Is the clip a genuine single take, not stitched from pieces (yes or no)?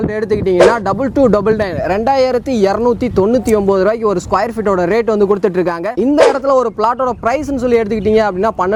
yes